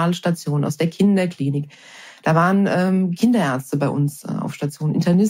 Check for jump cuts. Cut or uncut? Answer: uncut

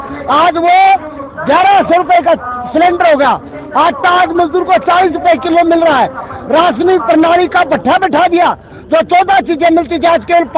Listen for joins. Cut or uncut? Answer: uncut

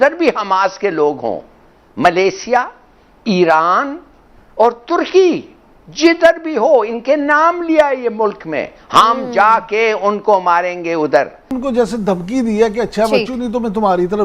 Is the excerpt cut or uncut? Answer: cut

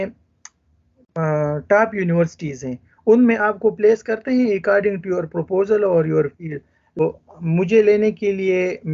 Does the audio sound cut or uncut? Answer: cut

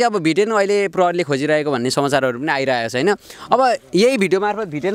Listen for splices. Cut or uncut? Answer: uncut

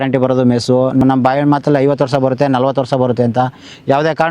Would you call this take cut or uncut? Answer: cut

